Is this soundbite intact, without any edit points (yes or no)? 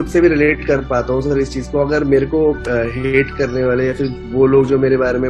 yes